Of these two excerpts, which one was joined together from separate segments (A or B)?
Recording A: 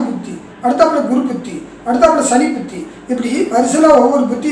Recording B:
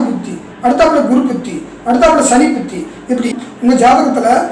B